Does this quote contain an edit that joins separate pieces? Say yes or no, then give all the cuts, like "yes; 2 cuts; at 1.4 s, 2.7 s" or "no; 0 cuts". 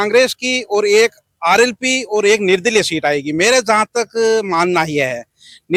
no; 0 cuts